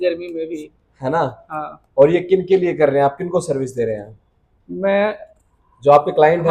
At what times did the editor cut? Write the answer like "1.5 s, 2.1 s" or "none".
none

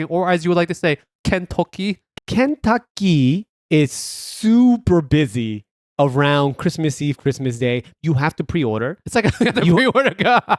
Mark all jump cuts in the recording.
1.1 s, 2.1 s, 3.5 s, 7.9 s

